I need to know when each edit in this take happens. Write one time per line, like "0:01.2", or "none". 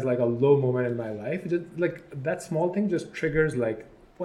none